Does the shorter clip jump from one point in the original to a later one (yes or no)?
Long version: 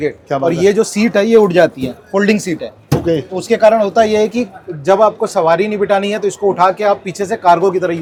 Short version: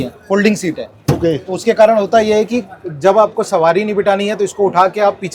no